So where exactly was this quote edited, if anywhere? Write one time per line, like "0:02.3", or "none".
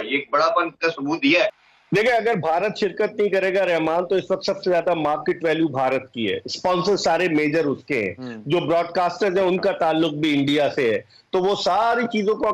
0:01.4